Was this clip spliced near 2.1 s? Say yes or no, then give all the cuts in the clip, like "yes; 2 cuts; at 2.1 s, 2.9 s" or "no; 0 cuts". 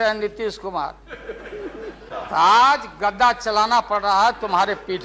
yes; 1 cut; at 2.1 s